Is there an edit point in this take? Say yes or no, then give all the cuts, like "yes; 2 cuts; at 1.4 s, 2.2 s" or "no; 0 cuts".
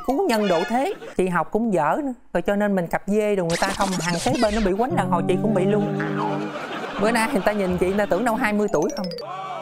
yes; 2 cuts; at 1.0 s, 6.7 s